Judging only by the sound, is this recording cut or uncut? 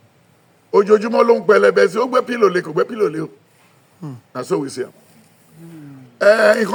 uncut